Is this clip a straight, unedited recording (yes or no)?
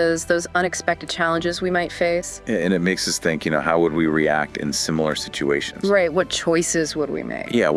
yes